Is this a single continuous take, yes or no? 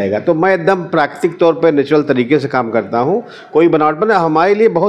yes